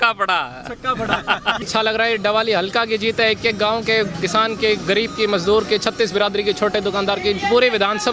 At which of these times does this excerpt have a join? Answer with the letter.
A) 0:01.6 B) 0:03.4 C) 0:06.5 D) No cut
A